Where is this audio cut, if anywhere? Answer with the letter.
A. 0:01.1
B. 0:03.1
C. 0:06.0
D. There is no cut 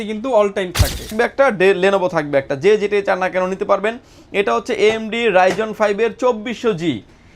A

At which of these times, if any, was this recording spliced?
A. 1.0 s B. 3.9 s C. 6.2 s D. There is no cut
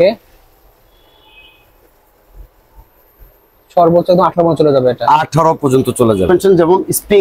C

